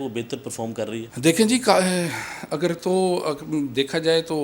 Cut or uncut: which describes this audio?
uncut